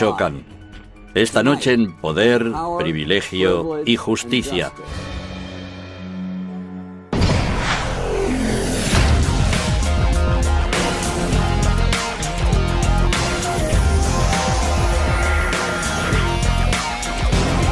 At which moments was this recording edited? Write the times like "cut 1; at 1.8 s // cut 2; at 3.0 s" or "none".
none